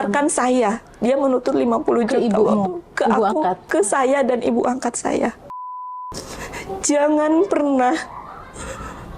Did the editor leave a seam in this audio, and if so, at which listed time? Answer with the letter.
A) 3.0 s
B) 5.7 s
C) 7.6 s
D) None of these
B